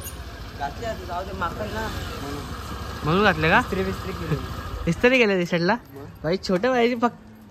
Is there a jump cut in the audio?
no; 0 cuts

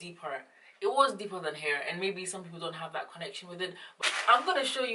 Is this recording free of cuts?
no; 1 cut; at 3.8 s

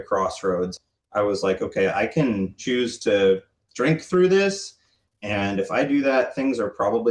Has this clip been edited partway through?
yes; 1 cut; at 2.6 s

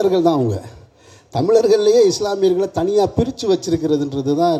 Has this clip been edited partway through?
no; 0 cuts

